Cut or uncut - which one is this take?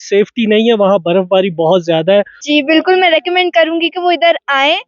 cut